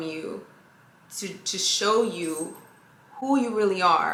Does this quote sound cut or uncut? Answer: uncut